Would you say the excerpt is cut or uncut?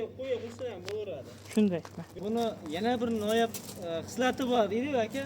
cut